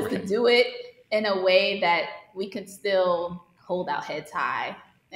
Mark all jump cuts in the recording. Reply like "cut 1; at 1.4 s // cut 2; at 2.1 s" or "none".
cut 1; at 3.5 s

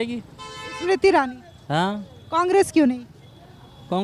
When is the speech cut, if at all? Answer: none

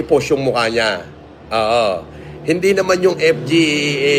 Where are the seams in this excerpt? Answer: none

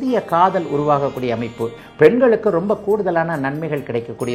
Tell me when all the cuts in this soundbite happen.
cut 1; at 1.8 s

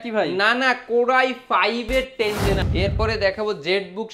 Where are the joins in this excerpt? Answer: cut 1; at 2.6 s

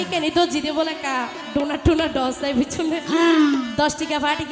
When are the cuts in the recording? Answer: none

